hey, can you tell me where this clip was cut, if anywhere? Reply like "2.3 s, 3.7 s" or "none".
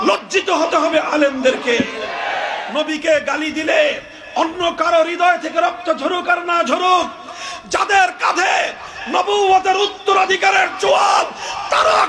2.6 s